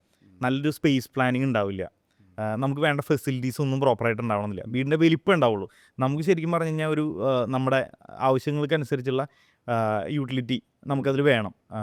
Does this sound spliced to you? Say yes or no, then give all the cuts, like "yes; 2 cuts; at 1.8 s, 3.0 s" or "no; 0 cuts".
no; 0 cuts